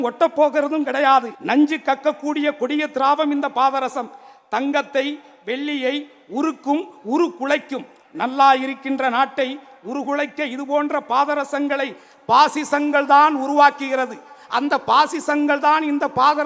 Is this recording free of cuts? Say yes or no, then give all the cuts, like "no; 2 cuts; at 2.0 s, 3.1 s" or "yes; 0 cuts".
no; 1 cut; at 1.4 s